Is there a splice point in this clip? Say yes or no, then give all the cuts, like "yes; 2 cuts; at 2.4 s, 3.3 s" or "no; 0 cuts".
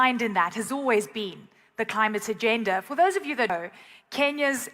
yes; 1 cut; at 3.5 s